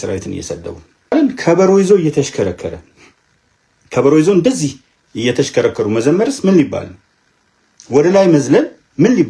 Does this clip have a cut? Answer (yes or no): yes